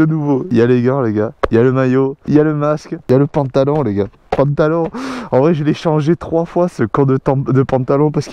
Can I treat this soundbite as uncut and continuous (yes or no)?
yes